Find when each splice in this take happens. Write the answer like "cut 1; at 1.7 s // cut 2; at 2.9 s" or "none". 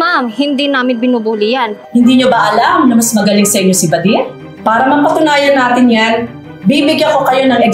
cut 1; at 1.8 s // cut 2; at 4.4 s